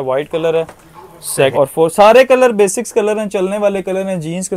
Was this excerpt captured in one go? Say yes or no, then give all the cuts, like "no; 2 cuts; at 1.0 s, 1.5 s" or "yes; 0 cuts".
no; 1 cut; at 1.5 s